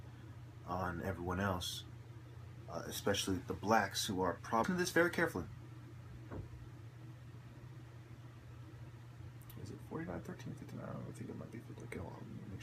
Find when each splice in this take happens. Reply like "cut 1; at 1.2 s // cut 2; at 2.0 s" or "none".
none